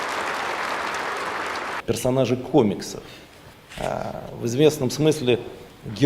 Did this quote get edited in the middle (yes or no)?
yes